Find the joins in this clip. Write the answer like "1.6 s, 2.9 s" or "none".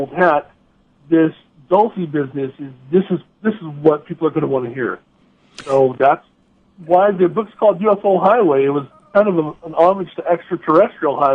none